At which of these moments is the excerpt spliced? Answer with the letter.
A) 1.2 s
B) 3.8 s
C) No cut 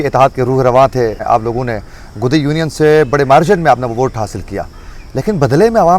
A